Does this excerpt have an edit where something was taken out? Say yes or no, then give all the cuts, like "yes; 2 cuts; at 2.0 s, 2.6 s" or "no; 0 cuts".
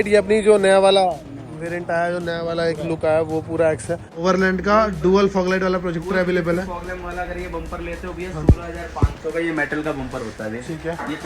yes; 1 cut; at 4.2 s